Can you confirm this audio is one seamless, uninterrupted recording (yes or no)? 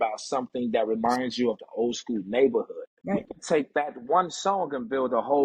no